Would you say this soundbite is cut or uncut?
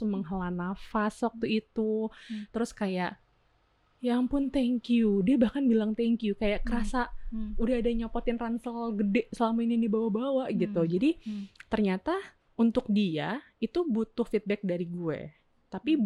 uncut